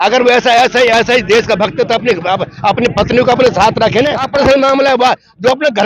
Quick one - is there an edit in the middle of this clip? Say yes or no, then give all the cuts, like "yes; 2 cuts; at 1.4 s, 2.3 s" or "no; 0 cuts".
yes; 1 cut; at 4.3 s